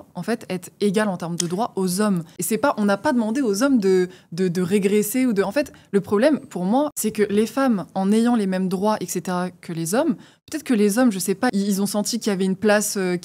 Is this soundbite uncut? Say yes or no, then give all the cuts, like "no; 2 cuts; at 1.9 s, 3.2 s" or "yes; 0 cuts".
no; 3 cuts; at 2.3 s, 6.9 s, 11.5 s